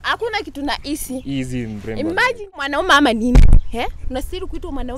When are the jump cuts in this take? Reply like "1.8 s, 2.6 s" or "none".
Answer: 2.6 s